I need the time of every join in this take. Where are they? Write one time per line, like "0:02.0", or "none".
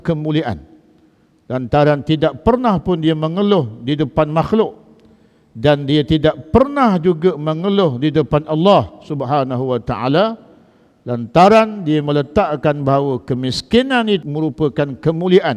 0:14.2